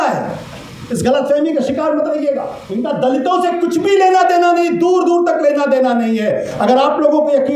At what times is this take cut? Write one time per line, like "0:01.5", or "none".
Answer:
0:02.6